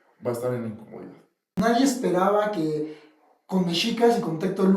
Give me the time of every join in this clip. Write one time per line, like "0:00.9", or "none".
0:01.5